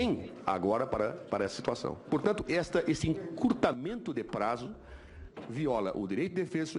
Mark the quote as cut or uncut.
cut